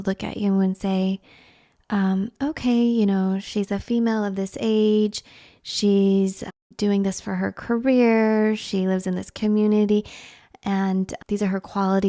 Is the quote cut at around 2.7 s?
no; 2 cuts; at 6.6 s, 11.1 s

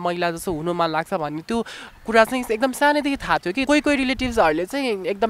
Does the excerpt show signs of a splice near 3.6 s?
yes; 1 cut; at 3.6 s

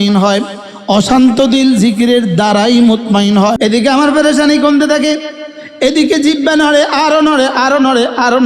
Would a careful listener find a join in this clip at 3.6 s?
yes; 1 cut; at 3.6 s

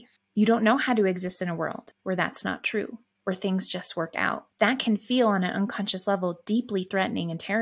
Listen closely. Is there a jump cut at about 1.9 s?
yes; 2 cuts; at 1.9 s, 4.5 s

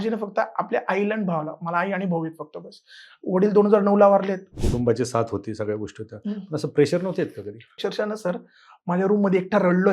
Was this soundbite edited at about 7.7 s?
yes; 2 cuts; at 4.5 s, 7.7 s

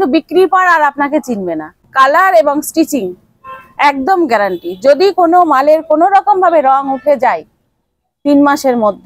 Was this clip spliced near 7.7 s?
no; 1 cut; at 1.8 s

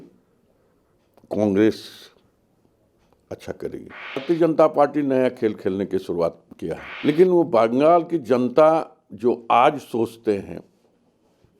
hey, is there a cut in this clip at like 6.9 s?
yes; 2 cuts; at 4.2 s, 6.9 s

